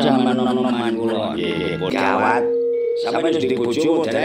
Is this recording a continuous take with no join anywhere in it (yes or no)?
no